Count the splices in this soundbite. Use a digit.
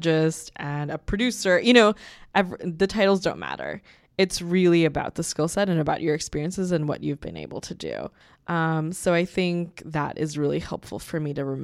1